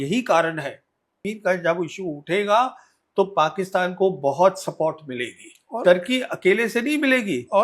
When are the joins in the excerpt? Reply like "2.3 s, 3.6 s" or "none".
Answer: 1.2 s